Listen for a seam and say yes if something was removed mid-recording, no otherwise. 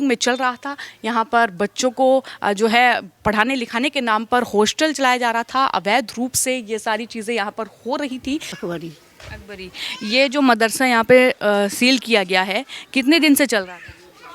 yes